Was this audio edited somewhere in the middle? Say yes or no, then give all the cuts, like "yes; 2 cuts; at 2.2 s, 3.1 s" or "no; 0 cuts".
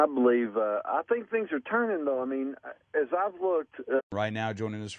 no; 0 cuts